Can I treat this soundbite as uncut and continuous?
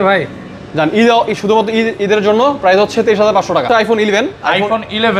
no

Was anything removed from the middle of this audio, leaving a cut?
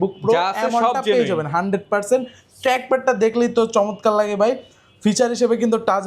no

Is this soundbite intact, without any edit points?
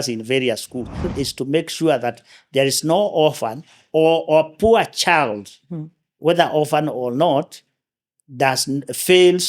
no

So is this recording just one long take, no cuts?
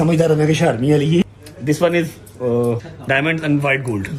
no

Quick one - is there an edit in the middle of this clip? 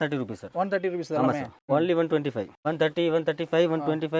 yes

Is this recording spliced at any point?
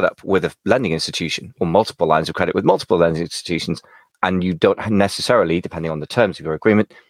no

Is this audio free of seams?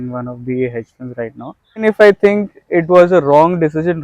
no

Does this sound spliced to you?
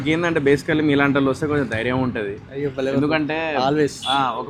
no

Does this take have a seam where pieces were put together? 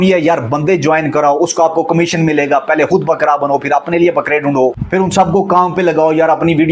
yes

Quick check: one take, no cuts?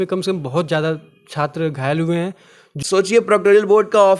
no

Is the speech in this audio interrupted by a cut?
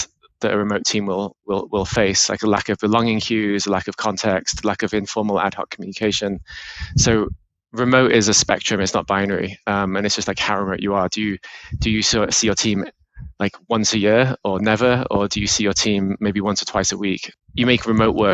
yes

